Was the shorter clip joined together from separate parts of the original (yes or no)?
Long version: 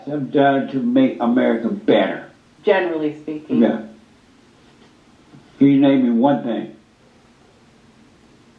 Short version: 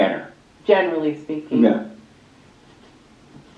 no